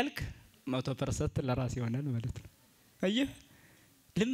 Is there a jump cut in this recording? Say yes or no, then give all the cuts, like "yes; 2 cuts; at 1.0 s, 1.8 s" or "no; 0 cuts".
no; 0 cuts